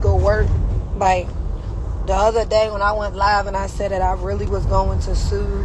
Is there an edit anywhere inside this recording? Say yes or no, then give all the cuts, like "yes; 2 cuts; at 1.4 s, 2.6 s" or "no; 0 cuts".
no; 0 cuts